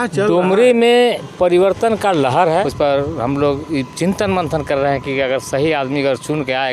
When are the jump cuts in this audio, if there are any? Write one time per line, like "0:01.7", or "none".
0:02.7